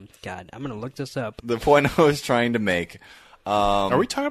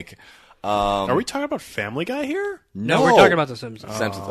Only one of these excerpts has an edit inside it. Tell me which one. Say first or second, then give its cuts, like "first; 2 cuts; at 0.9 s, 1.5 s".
first; 1 cut; at 1.4 s